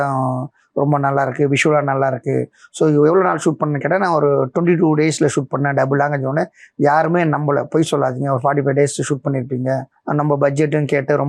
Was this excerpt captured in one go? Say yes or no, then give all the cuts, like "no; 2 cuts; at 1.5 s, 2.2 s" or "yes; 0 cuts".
yes; 0 cuts